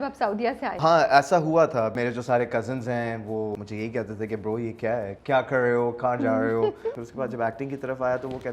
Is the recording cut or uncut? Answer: cut